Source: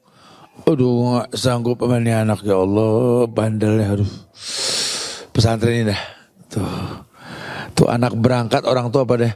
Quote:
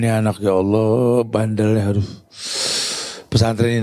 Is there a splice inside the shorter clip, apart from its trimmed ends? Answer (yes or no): no